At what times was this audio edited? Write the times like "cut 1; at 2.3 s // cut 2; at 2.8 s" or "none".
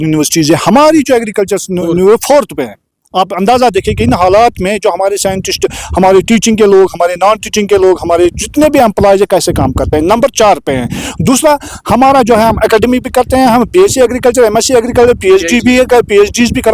none

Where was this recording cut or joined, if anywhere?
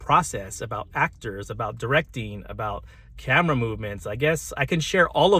none

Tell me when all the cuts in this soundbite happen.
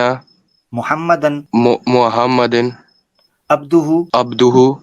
cut 1; at 1.4 s // cut 2; at 4.1 s

